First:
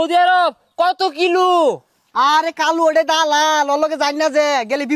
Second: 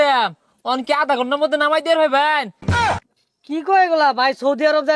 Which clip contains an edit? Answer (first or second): second